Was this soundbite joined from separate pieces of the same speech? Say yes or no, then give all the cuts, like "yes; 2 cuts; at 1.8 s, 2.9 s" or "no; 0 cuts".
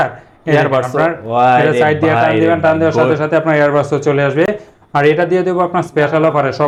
no; 0 cuts